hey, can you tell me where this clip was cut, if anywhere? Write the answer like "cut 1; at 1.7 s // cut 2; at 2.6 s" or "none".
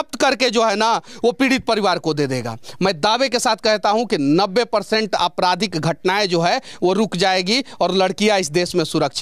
none